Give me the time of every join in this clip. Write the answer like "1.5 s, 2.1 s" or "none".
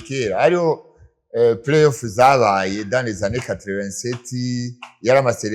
none